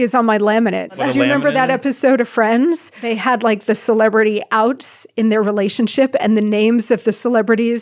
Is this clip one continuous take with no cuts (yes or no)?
no